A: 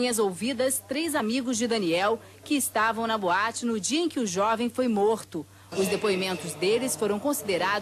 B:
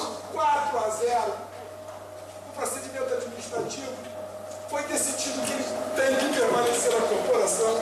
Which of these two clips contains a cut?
B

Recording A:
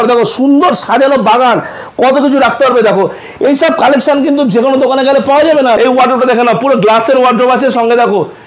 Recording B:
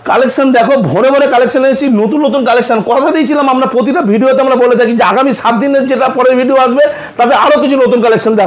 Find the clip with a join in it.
A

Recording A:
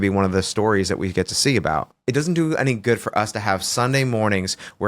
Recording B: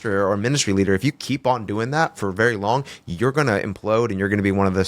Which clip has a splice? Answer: A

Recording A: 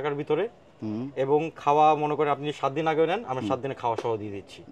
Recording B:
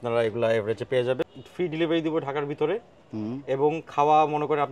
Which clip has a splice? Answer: B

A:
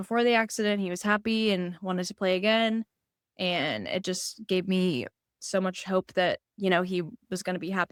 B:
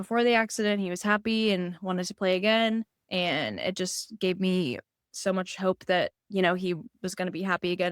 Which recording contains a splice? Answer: B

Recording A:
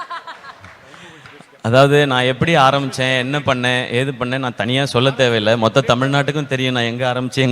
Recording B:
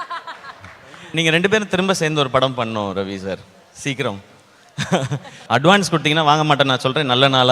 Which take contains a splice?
B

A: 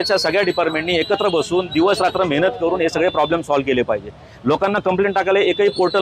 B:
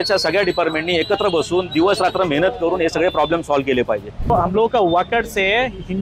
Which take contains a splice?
B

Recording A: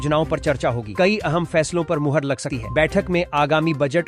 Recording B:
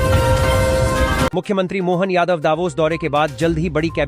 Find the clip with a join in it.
B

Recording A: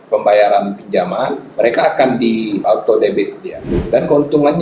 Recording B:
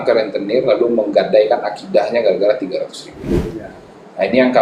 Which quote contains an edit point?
A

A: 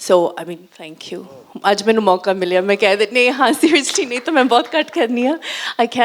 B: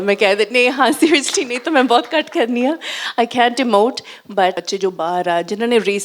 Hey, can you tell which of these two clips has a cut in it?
B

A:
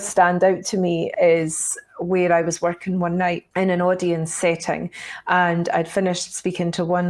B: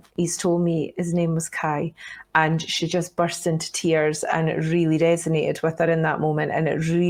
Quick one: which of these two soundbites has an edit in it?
A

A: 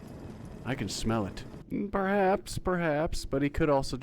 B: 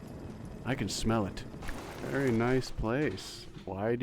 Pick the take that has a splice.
A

